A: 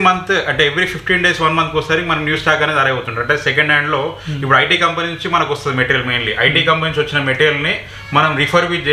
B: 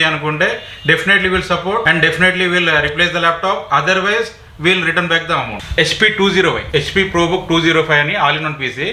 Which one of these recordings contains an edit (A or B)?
B